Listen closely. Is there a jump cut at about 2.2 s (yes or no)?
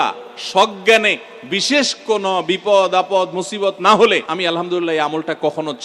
no